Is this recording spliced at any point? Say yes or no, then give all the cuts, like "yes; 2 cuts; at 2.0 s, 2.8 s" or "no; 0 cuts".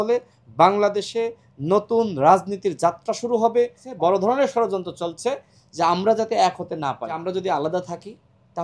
yes; 2 cuts; at 3.9 s, 7.2 s